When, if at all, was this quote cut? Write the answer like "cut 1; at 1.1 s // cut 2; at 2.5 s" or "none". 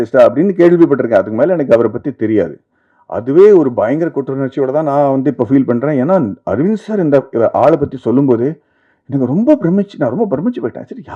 none